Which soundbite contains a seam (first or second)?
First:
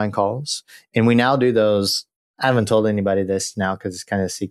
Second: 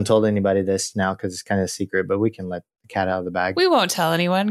second